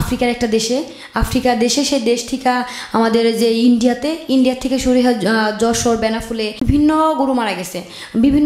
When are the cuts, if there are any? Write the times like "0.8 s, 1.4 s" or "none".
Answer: 6.7 s